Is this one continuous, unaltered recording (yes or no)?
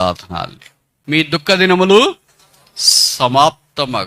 no